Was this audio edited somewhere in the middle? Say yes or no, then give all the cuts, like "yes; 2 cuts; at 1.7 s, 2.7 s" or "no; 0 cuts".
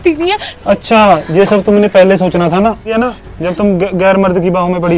yes; 1 cut; at 2.9 s